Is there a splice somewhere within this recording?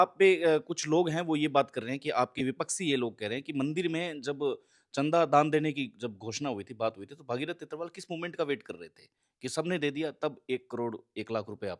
no; 0 cuts

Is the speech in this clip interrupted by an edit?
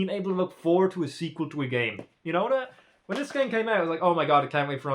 no; 0 cuts

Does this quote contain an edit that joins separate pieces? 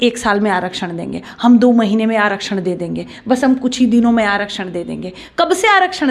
no; 0 cuts

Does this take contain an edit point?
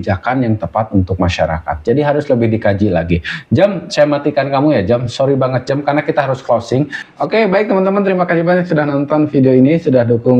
no; 0 cuts

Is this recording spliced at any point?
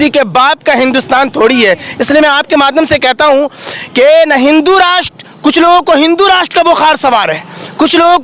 no; 0 cuts

